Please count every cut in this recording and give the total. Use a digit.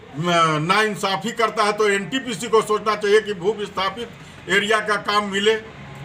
0